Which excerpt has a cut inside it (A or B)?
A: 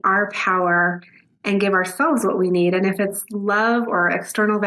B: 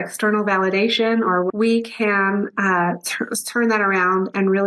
B